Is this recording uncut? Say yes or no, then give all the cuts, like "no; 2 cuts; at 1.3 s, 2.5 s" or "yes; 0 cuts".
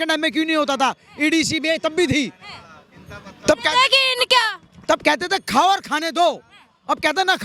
yes; 0 cuts